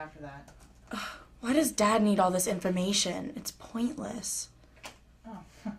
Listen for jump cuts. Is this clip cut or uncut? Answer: cut